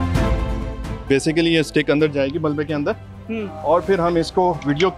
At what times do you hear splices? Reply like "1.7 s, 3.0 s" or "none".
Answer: 0.9 s